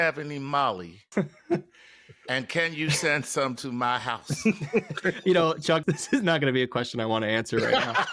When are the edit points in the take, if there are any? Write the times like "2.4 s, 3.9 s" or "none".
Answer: 0.9 s, 5.8 s

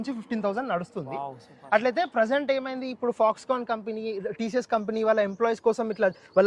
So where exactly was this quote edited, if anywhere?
none

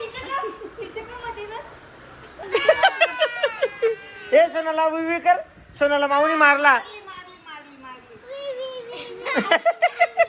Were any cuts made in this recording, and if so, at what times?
2.4 s

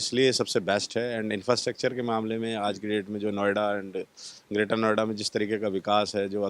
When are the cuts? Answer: none

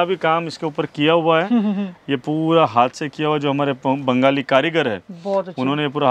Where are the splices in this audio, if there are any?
none

